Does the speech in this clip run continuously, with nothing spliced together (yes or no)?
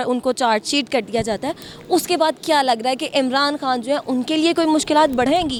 yes